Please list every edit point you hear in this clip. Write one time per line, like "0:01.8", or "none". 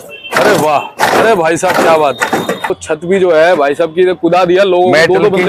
0:02.8